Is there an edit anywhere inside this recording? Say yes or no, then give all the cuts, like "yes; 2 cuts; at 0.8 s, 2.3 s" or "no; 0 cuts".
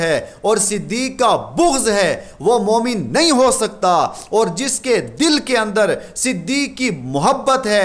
no; 0 cuts